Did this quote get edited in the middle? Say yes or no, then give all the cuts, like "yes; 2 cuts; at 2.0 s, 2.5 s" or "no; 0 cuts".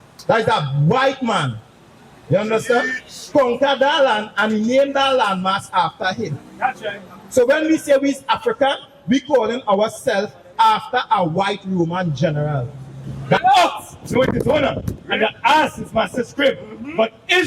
yes; 1 cut; at 13.4 s